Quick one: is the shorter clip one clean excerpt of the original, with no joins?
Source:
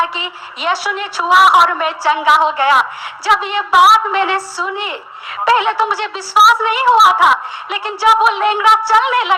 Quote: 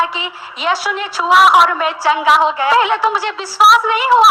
no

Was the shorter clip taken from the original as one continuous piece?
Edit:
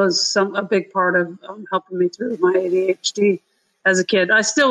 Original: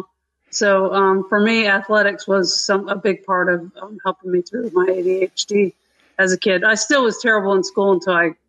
yes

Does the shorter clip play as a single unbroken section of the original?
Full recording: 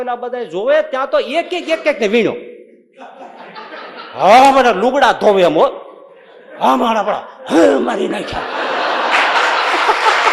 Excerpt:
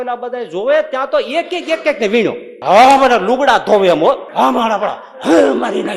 no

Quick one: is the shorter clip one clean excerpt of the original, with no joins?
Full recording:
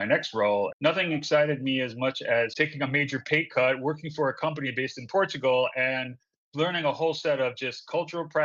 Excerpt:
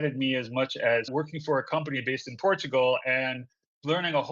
no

